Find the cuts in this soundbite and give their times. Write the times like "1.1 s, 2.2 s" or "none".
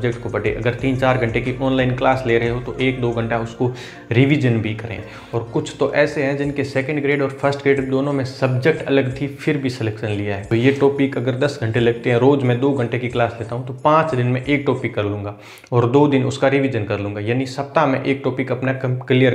5.1 s, 10.4 s